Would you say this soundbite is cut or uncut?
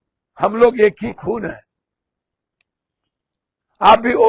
uncut